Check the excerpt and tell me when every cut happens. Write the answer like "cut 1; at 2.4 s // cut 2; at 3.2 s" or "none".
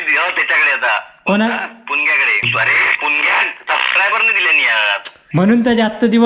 cut 1; at 2.4 s // cut 2; at 5.0 s